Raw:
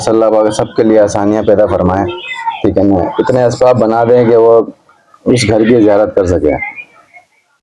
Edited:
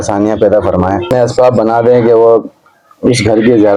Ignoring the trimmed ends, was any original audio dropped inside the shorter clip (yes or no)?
yes